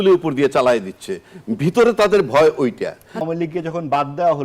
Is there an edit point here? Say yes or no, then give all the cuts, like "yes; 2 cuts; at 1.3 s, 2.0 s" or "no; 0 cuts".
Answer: yes; 1 cut; at 3.2 s